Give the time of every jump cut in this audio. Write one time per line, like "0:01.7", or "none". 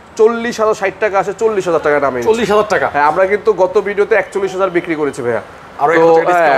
none

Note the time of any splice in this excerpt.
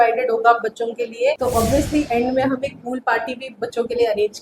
0:01.4

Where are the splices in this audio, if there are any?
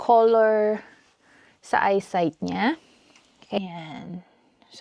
0:03.6

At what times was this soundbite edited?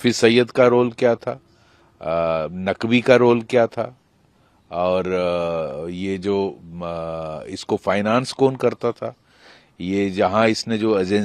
none

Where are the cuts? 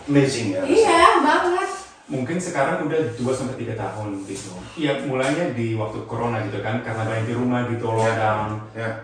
none

